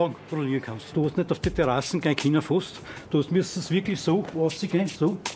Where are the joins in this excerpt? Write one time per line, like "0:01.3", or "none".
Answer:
0:00.9

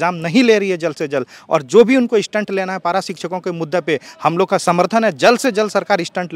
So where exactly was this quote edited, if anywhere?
none

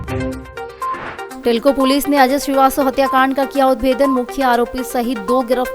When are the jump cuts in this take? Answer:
0:00.9

